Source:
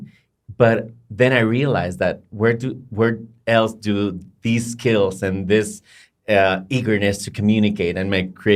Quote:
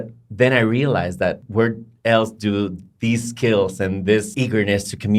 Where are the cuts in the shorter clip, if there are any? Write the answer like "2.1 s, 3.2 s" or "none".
1.4 s, 4.3 s